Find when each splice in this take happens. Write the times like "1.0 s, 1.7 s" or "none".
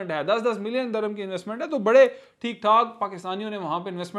none